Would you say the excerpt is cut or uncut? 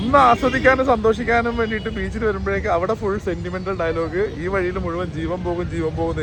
uncut